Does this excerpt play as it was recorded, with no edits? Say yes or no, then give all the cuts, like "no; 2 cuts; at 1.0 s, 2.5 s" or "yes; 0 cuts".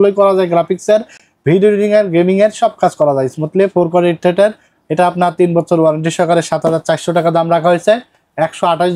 yes; 0 cuts